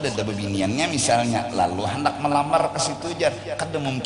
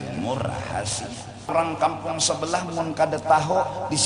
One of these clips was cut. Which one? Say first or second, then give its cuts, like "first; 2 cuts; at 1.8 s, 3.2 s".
second; 1 cut; at 1.5 s